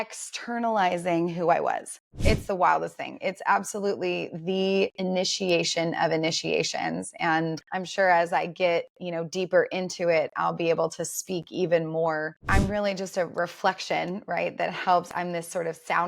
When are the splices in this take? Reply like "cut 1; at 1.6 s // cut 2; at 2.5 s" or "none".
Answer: cut 1; at 2.1 s // cut 2; at 7.6 s // cut 3; at 12.5 s // cut 4; at 15.1 s